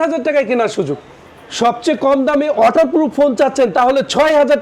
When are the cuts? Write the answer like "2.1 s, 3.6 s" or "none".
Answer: 1.4 s